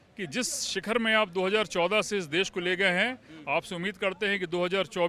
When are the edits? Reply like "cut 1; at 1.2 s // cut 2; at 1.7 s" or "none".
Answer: none

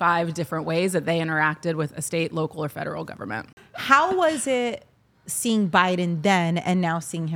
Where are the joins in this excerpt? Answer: cut 1; at 3.7 s

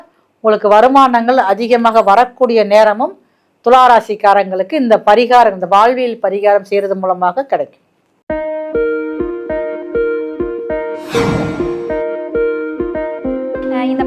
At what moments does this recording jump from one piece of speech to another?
cut 1; at 8.0 s

